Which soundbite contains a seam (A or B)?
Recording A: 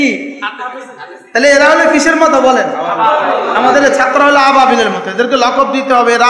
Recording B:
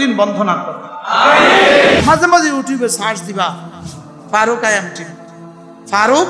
B